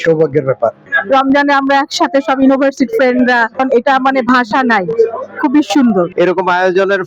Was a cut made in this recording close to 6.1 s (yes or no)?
yes